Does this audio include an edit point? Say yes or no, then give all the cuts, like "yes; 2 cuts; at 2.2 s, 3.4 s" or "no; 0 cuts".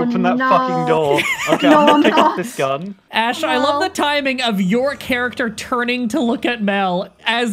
yes; 1 cut; at 3.0 s